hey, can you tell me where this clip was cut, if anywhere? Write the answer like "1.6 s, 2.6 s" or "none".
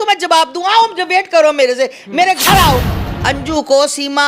3.1 s

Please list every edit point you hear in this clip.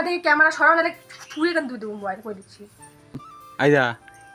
3.2 s

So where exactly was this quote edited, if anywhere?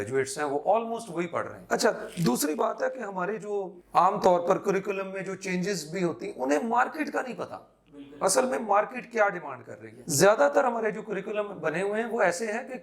none

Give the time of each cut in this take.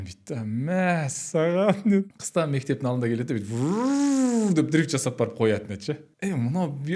2.1 s, 6.1 s

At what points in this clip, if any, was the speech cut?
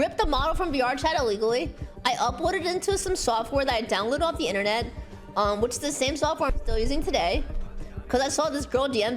none

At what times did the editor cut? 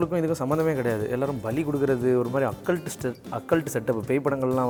none

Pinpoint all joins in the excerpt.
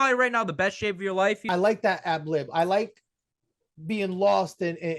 1.4 s

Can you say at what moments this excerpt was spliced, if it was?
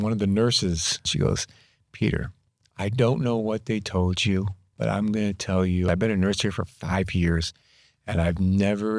1.1 s, 5.9 s

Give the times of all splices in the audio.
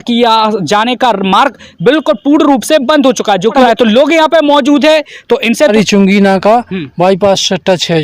3.6 s, 5.7 s

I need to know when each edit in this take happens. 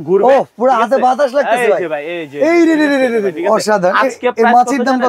3.3 s

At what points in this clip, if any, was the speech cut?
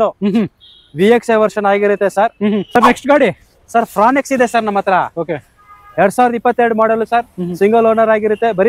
2.7 s

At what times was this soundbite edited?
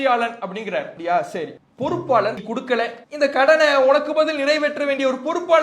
0.9 s, 1.6 s, 2.4 s

